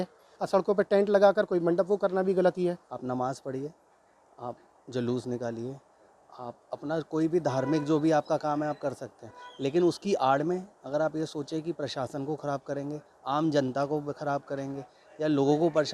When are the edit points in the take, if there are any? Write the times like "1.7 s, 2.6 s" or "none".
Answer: 2.9 s